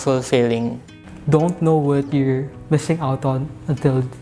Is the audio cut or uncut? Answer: cut